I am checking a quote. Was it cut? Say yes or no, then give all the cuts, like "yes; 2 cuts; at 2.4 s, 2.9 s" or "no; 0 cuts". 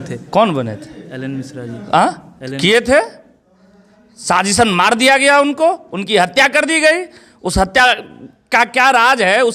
no; 0 cuts